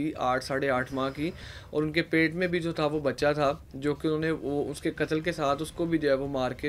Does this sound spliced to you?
no; 0 cuts

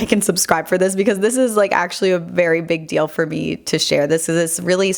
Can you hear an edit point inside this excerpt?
no; 0 cuts

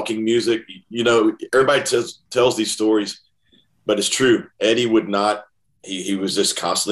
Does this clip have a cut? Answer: no; 0 cuts

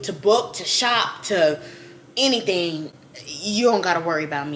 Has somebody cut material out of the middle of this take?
no; 0 cuts

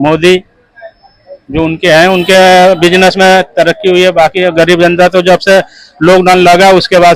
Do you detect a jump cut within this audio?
no; 0 cuts

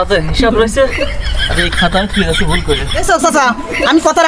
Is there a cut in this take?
yes; 1 cut; at 3.0 s

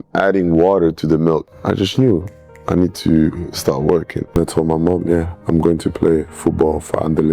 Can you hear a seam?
yes; 2 cuts; at 1.5 s, 4.3 s

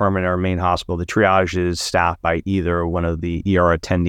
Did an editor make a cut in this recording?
no; 0 cuts

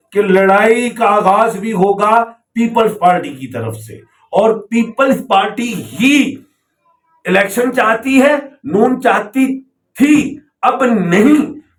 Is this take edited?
no; 0 cuts

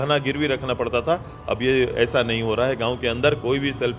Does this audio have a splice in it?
no; 0 cuts

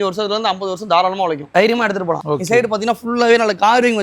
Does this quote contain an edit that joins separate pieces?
yes; 2 cuts; at 1.4 s, 2.2 s

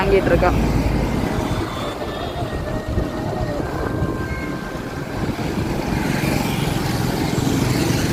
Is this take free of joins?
yes; 0 cuts

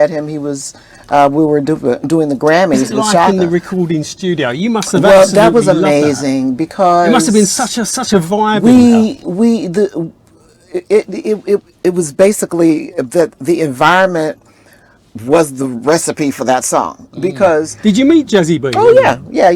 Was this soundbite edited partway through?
yes; 2 cuts; at 3.3 s, 17.7 s

